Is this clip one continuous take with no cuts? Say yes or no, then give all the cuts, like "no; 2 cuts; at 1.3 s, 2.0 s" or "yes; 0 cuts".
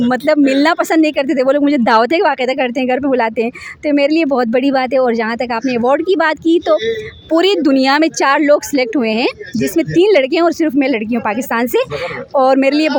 yes; 0 cuts